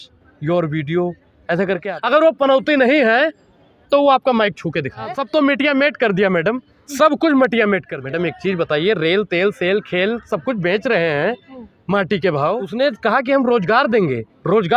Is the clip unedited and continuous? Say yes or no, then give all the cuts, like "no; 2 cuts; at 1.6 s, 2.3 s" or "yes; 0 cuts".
no; 4 cuts; at 1.9 s, 5.2 s, 7.9 s, 12.7 s